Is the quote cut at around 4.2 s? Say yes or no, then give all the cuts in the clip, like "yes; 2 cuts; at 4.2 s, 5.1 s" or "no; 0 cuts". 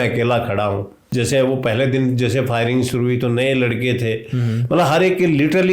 no; 1 cut; at 1.0 s